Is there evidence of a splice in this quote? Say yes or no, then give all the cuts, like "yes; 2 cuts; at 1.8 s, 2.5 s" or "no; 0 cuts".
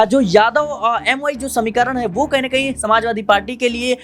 no; 0 cuts